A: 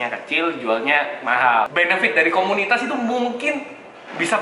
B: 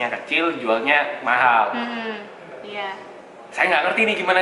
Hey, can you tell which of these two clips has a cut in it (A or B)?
A